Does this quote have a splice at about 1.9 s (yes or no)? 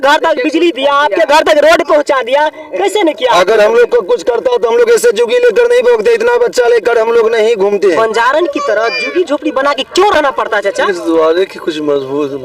no